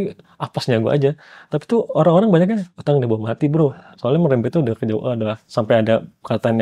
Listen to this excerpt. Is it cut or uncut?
cut